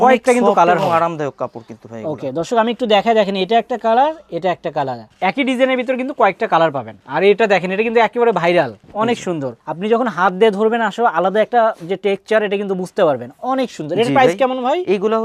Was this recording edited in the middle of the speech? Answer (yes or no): no